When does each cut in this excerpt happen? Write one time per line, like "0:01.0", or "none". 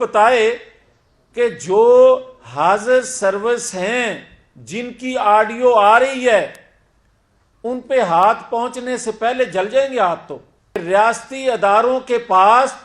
0:10.8